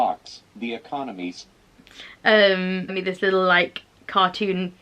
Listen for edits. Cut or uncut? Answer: cut